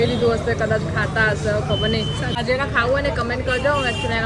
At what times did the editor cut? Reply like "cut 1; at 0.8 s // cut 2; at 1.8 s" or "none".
cut 1; at 2.3 s